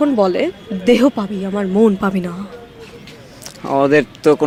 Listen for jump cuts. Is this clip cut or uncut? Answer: uncut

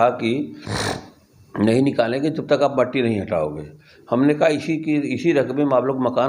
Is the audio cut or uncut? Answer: uncut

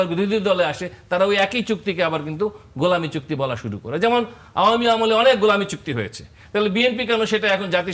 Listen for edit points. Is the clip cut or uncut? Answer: uncut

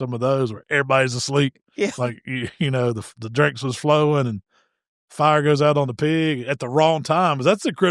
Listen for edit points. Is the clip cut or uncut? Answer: uncut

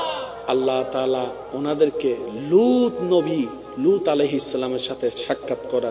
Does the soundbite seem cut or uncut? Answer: uncut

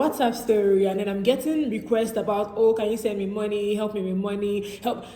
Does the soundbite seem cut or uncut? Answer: uncut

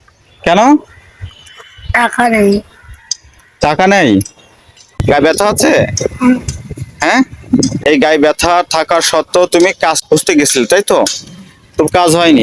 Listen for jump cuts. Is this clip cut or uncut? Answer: cut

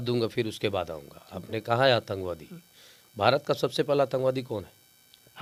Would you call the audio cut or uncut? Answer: uncut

